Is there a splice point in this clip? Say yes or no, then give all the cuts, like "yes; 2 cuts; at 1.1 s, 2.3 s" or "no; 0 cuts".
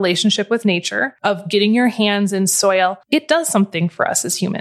yes; 2 cuts; at 1.0 s, 3.0 s